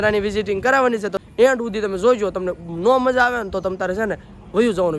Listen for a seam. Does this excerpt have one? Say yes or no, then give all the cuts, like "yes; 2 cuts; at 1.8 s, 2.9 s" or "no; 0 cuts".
yes; 1 cut; at 1.2 s